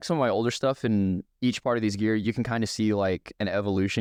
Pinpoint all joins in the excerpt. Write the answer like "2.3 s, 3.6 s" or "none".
none